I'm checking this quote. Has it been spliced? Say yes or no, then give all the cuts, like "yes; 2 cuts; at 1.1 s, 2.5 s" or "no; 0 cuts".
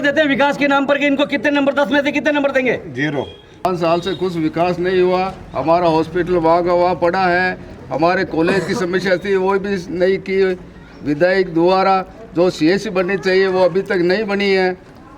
yes; 1 cut; at 3.7 s